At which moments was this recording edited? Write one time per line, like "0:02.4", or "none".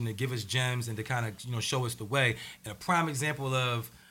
none